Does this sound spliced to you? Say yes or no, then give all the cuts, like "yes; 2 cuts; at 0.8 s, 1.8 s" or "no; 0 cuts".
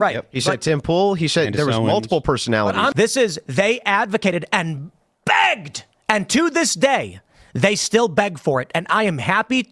yes; 1 cut; at 2.9 s